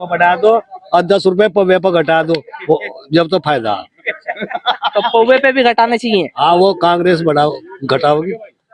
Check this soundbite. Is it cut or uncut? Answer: uncut